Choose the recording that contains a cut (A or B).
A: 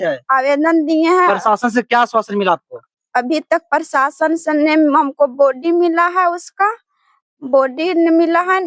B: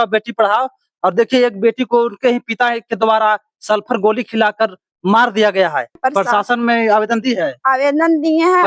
B